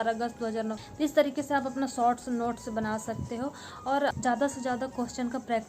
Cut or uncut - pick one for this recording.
cut